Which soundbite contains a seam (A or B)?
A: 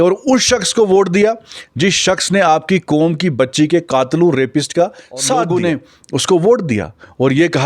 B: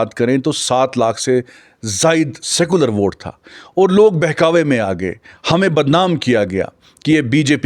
A